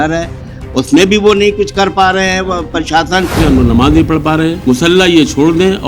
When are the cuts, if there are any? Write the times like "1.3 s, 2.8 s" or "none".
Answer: 3.4 s, 4.6 s